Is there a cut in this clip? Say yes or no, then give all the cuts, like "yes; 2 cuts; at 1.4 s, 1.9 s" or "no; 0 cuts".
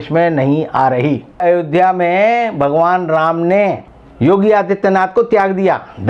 yes; 1 cut; at 1.4 s